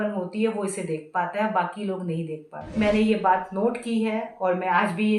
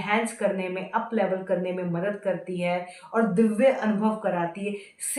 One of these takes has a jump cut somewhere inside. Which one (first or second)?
first